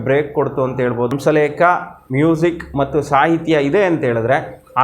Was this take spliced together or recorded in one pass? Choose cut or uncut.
cut